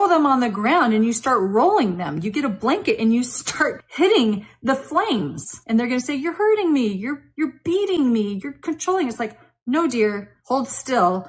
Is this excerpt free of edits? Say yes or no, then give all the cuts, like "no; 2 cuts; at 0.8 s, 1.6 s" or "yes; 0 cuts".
yes; 0 cuts